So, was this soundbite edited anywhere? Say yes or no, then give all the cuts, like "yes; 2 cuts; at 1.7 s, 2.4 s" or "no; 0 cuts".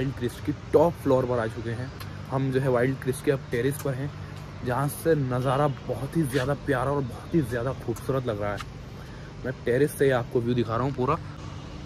no; 0 cuts